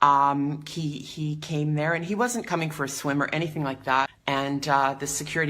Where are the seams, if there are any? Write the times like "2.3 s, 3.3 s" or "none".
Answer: 4.1 s